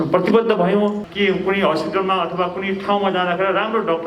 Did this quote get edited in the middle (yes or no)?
yes